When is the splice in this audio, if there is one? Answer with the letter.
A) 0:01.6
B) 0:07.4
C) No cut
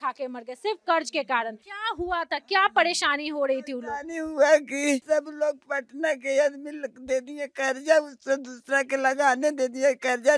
A